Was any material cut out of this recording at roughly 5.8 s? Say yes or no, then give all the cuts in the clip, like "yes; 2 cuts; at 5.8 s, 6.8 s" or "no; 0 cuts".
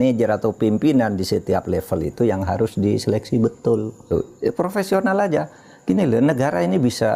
no; 1 cut; at 4.0 s